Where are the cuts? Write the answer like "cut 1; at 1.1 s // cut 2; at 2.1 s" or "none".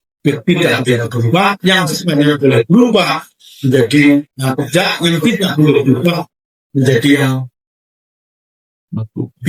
none

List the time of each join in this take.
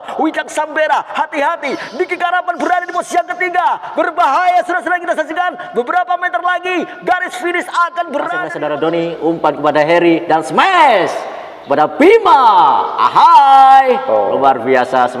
cut 1; at 8.5 s

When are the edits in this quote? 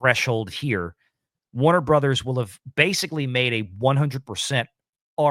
none

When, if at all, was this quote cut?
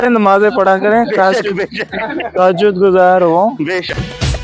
none

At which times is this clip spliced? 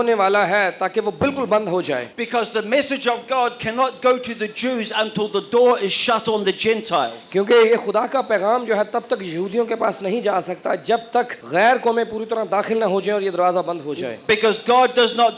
cut 1; at 2.1 s // cut 2; at 11.4 s

